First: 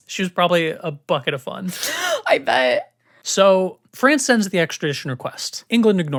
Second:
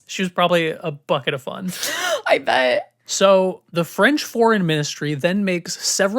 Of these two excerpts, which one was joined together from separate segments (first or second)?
second